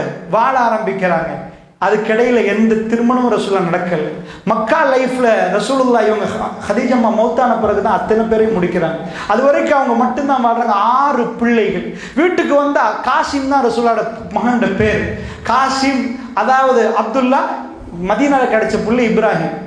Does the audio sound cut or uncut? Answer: uncut